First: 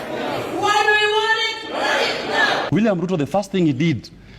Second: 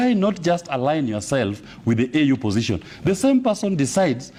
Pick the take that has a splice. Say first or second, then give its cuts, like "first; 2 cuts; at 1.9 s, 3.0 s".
first; 1 cut; at 2.7 s